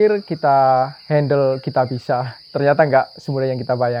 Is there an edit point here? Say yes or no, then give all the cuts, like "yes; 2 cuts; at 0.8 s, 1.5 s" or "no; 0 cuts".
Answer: no; 0 cuts